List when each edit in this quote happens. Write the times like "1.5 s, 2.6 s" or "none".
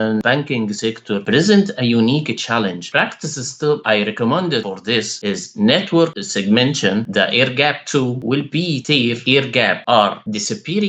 none